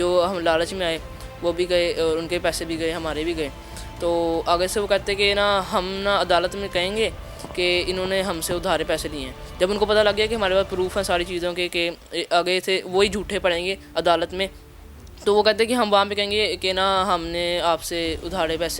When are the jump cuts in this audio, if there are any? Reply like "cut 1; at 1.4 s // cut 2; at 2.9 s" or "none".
none